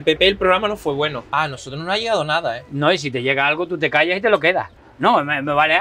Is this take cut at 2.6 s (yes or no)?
no